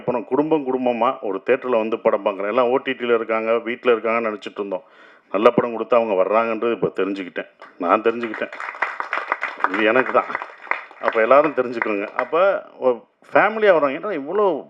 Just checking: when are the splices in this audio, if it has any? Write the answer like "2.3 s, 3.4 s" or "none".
none